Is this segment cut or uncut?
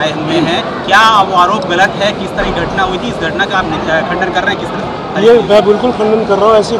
uncut